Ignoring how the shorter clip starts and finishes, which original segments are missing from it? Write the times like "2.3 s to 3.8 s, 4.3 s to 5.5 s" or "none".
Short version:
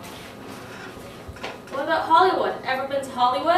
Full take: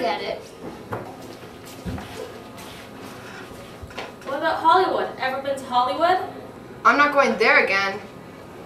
none